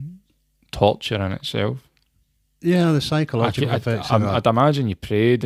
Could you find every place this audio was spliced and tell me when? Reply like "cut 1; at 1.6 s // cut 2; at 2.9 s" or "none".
none